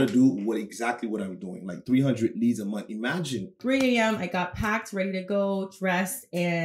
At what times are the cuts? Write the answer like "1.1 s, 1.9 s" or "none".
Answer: 3.6 s